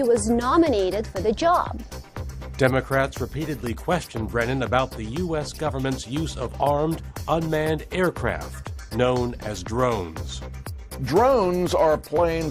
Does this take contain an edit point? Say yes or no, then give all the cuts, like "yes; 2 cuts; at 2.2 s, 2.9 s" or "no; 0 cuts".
no; 0 cuts